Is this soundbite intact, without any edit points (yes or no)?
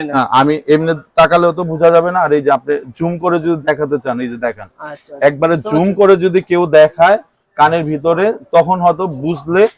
yes